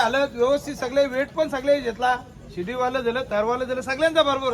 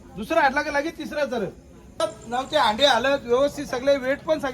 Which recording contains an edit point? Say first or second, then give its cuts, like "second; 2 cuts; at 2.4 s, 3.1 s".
second; 1 cut; at 2.0 s